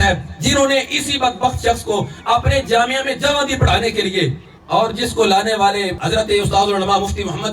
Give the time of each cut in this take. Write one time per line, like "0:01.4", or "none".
none